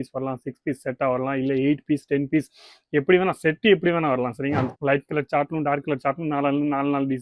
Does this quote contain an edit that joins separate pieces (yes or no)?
yes